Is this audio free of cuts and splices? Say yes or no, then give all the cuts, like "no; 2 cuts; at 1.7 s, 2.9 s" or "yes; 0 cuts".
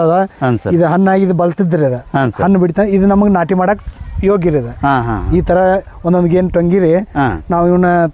yes; 0 cuts